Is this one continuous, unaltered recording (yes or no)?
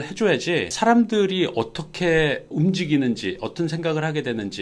yes